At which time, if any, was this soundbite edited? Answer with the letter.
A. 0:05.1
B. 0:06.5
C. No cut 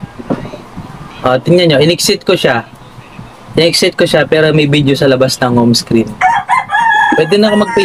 B